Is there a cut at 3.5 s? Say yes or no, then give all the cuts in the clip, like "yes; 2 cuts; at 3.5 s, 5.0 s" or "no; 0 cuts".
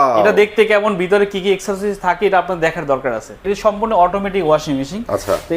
yes; 1 cut; at 3.5 s